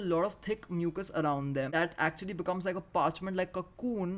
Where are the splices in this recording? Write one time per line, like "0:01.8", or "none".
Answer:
0:01.7